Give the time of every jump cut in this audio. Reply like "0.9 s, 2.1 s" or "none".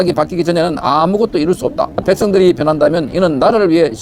2.0 s